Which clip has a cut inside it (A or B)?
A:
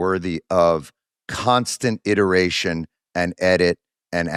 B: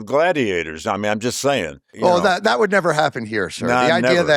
B